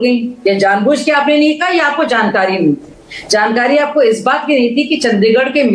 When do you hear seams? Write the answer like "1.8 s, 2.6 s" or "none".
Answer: none